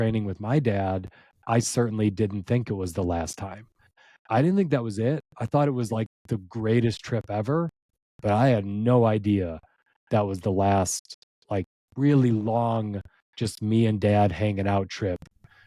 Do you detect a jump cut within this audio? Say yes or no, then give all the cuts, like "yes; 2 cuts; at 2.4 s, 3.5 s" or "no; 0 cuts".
yes; 1 cut; at 4.0 s